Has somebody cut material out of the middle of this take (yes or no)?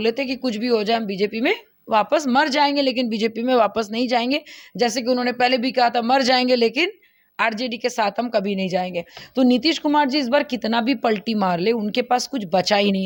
no